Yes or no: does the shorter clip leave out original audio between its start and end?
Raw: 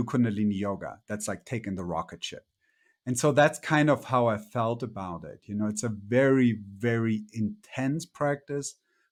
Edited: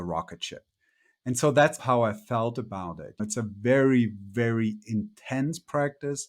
yes